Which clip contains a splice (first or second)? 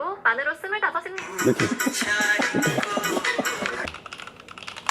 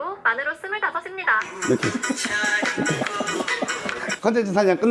first